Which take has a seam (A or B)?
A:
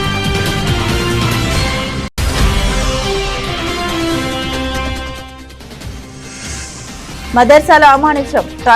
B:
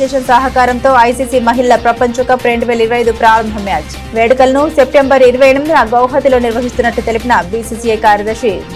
A